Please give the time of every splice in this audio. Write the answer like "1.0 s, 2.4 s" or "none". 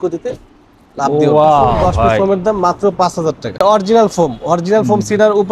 2.2 s, 3.6 s